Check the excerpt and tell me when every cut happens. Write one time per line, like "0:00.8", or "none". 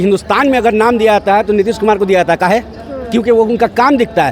none